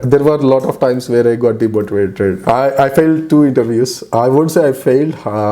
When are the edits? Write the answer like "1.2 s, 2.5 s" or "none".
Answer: 2.4 s